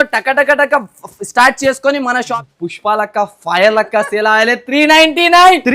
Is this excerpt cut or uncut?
cut